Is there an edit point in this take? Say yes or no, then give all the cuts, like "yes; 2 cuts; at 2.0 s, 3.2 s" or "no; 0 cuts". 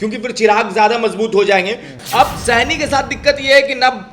yes; 1 cut; at 2.0 s